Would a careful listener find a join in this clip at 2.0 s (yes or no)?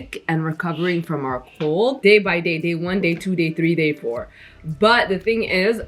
no